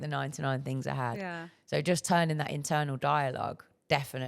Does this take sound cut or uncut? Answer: uncut